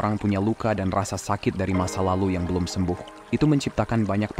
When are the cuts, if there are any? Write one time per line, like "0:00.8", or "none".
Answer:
0:03.1